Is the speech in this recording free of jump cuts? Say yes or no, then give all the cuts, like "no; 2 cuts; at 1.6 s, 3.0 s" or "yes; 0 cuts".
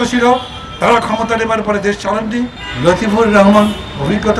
no; 1 cut; at 2.6 s